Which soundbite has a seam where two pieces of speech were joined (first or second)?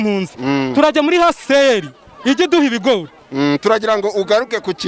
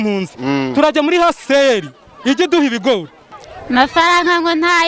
second